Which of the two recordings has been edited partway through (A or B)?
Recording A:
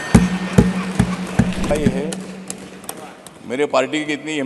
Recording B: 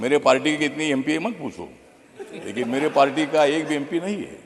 A